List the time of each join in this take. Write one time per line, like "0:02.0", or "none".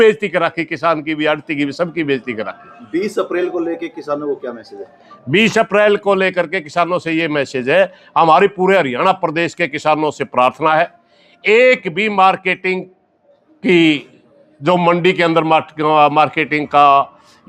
none